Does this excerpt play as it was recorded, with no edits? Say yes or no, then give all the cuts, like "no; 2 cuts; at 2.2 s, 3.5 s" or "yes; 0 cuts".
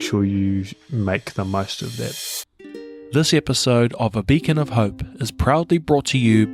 no; 1 cut; at 2.6 s